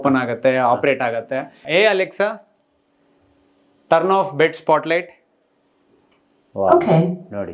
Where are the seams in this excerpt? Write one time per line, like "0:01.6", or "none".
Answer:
0:01.5